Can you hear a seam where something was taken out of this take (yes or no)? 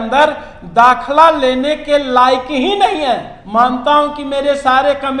yes